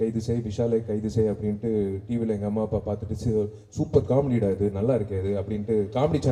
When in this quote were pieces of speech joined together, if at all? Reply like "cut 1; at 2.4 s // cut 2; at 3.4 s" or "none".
none